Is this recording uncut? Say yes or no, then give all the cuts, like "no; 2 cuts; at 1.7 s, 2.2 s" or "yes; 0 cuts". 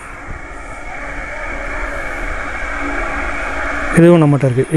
yes; 0 cuts